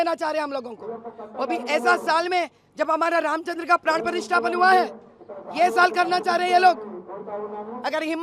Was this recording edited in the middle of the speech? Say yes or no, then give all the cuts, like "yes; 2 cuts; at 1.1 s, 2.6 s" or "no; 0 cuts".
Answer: no; 0 cuts